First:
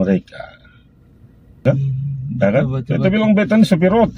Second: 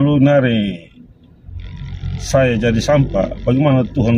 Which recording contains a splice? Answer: first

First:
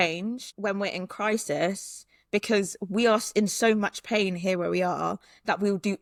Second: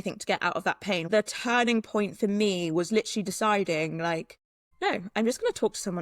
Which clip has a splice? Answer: second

